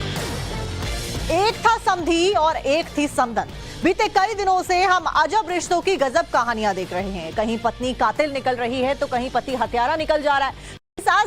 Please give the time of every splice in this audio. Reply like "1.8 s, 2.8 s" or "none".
2.2 s